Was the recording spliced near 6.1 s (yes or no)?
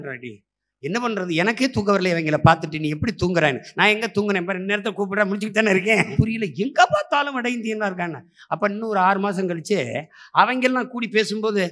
yes